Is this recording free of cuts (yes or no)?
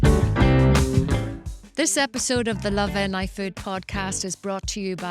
no